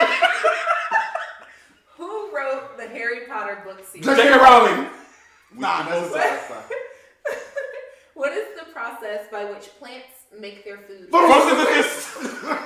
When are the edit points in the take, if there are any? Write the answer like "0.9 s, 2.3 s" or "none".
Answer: none